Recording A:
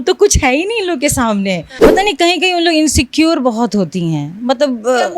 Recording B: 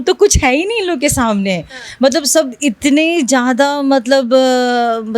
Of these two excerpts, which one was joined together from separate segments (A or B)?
A